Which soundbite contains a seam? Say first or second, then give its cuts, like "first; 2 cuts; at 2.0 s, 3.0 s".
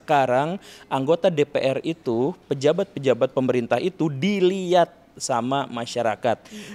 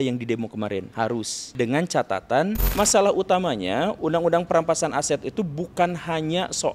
second; 3 cuts; at 1.0 s, 2.7 s, 4.0 s